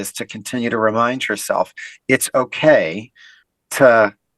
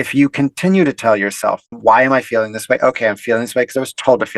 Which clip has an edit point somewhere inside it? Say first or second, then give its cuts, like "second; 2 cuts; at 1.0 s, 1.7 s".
second; 1 cut; at 1.7 s